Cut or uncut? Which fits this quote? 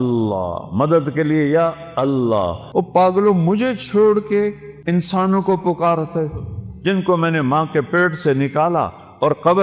cut